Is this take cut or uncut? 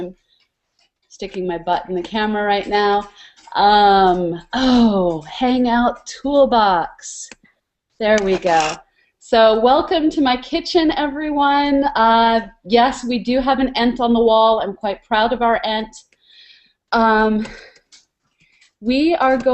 cut